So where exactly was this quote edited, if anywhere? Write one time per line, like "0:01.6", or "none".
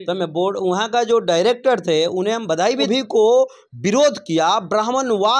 0:02.8